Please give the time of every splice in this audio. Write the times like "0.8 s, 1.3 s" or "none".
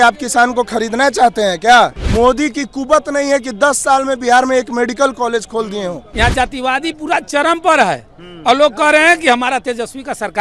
2.0 s, 6.0 s